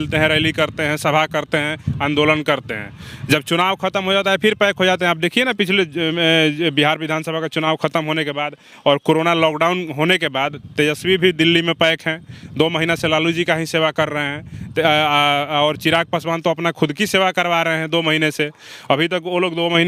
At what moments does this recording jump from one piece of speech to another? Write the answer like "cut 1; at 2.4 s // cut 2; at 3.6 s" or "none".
none

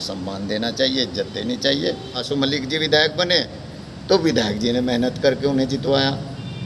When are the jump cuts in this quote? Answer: cut 1; at 2.2 s

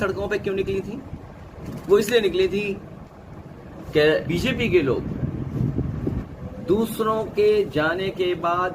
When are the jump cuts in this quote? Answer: cut 1; at 4.3 s

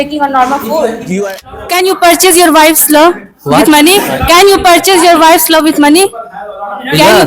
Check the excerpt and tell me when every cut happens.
cut 1; at 1.5 s

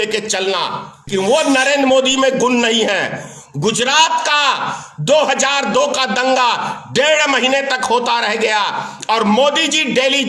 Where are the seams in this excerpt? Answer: cut 1; at 1.1 s

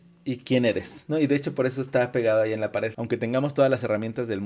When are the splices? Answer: cut 1; at 3.0 s

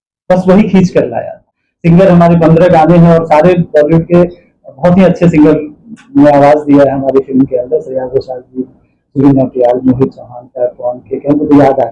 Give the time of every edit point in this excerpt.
cut 1; at 1.4 s

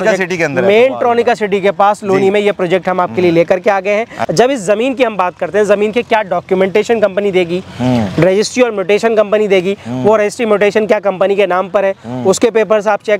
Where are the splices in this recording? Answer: cut 1; at 4.2 s

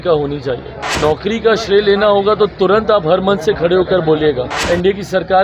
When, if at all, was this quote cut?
cut 1; at 0.9 s // cut 2; at 4.6 s

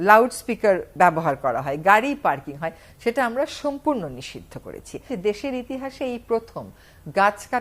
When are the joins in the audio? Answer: cut 1; at 5.1 s

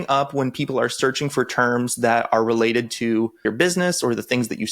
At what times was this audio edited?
cut 1; at 3.4 s

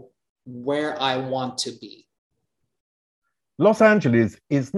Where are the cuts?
none

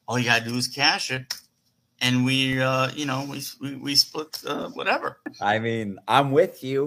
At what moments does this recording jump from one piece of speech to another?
cut 1; at 5.2 s

